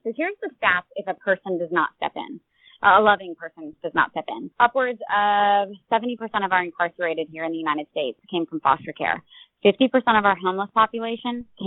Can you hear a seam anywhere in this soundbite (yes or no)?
yes